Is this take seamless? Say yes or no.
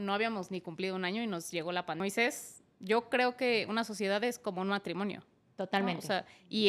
no